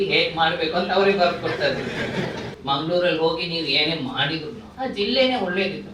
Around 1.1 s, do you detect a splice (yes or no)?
no